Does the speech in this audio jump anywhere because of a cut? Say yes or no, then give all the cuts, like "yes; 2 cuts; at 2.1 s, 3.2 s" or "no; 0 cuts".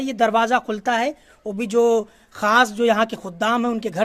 no; 0 cuts